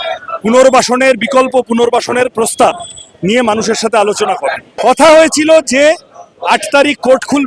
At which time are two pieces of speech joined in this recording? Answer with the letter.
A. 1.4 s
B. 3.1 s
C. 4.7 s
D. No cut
C